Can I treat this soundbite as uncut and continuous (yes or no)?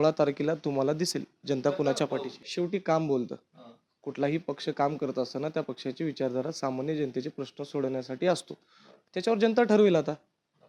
no